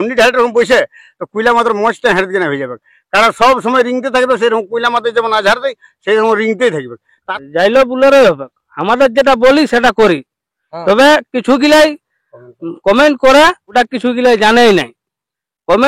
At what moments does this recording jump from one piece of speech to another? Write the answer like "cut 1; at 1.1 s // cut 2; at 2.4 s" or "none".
cut 1; at 7.2 s // cut 2; at 13.6 s